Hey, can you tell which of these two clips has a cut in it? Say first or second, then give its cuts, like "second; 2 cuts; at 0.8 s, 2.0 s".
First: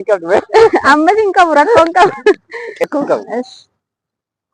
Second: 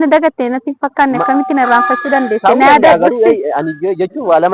first; 1 cut; at 2.7 s